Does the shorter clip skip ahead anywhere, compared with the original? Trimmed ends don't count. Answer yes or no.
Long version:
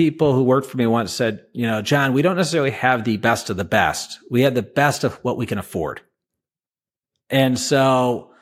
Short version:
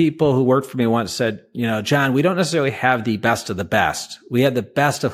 no